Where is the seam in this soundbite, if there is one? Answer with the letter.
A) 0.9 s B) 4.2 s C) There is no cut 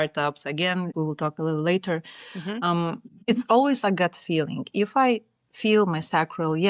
A